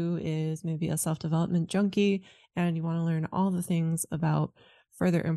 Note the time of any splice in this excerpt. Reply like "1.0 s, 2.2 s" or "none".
none